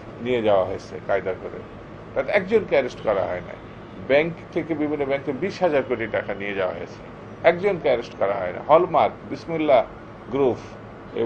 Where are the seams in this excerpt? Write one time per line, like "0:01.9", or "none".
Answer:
none